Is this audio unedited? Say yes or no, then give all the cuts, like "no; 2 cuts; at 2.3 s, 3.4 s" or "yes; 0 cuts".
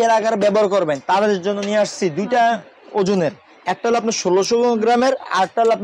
yes; 0 cuts